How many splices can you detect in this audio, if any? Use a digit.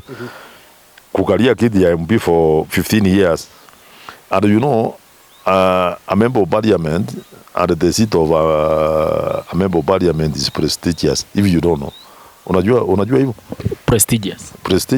0